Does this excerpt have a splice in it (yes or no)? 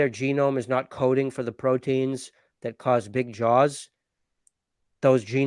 no